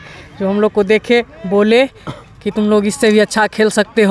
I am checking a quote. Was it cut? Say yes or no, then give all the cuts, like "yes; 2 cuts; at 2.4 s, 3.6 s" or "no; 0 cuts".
no; 0 cuts